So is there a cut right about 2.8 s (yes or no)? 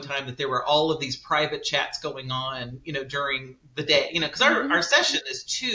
no